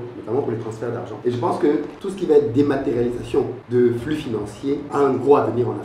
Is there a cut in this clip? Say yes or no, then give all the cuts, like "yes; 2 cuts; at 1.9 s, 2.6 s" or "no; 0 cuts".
yes; 4 cuts; at 1.2 s, 2.0 s, 3.6 s, 4.9 s